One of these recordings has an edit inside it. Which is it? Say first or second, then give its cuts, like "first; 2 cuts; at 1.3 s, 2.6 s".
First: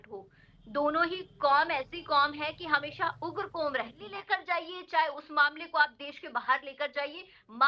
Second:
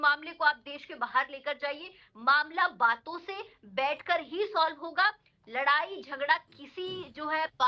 first; 1 cut; at 4.1 s